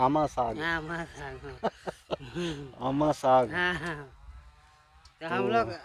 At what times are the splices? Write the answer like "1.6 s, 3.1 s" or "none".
none